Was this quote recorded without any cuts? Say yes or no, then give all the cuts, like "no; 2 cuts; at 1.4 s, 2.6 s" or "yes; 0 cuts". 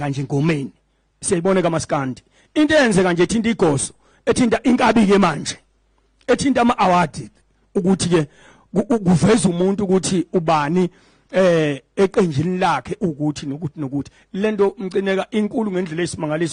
yes; 0 cuts